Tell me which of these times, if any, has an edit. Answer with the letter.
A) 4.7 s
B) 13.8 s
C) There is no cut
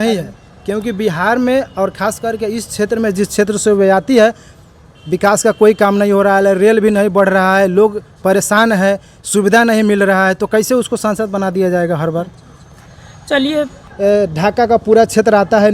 B